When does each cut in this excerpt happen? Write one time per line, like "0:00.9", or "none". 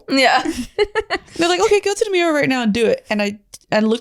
none